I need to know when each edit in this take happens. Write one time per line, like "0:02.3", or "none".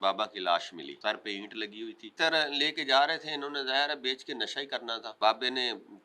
0:00.9
0:02.1
0:05.1